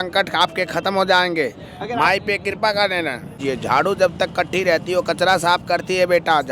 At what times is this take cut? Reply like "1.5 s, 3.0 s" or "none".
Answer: 3.4 s

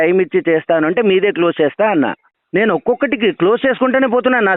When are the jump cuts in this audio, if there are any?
none

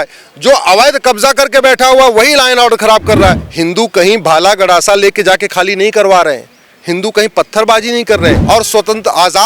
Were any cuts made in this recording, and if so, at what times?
3.5 s, 8.4 s

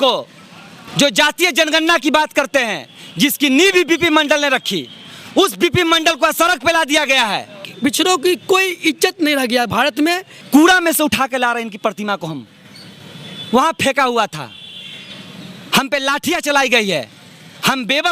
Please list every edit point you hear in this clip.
7.7 s, 10.3 s

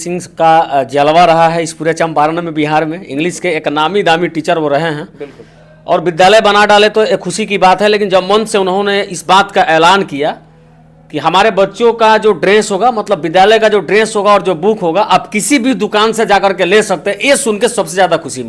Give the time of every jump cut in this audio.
none

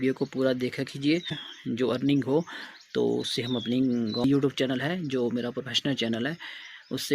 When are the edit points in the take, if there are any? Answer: 1.5 s, 4.2 s

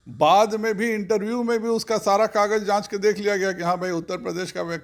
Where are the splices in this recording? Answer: none

